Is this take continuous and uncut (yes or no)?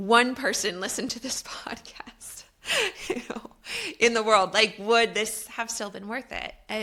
yes